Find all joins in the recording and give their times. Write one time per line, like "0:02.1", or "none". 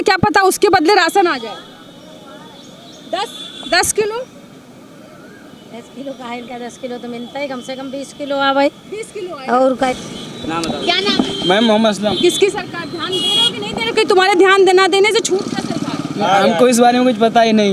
0:09.9